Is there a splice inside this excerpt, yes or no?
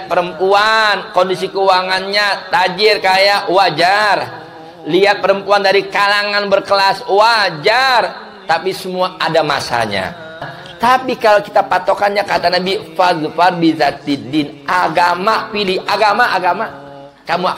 yes